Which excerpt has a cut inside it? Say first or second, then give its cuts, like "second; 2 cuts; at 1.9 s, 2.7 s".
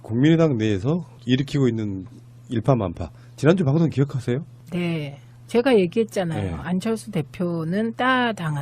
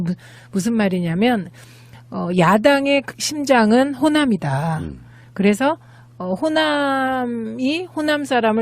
second; 1 cut; at 3.6 s